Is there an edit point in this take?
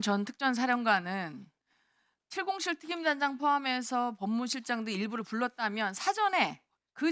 yes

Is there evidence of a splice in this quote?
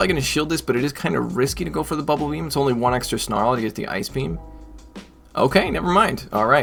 no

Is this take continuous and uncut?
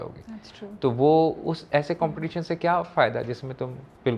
yes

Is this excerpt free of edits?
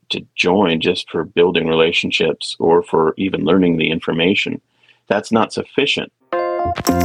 no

